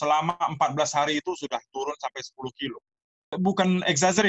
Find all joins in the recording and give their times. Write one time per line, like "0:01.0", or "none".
0:03.3